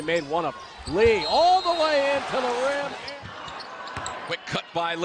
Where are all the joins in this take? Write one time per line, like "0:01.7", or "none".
none